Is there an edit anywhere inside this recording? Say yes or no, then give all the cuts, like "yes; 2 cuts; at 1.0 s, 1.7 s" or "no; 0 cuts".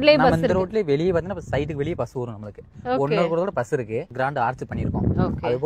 yes; 1 cut; at 4.1 s